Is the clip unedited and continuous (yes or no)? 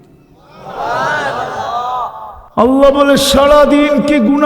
no